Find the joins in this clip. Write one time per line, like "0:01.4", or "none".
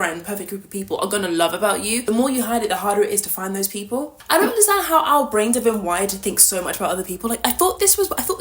0:02.0
0:04.2